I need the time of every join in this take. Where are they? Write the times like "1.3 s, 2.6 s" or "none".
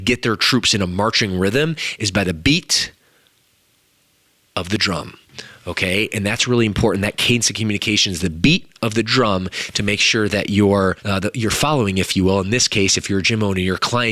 11.0 s